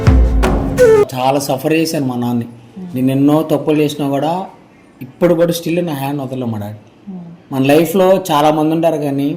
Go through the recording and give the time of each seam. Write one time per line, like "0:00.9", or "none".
0:01.1